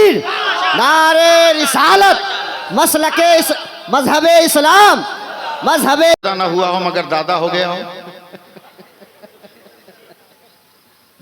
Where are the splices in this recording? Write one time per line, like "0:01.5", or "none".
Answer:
0:06.2